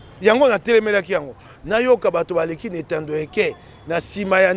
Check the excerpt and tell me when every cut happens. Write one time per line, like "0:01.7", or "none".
none